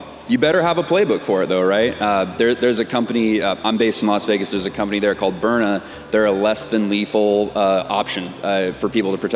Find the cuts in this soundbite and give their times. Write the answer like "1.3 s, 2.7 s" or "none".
none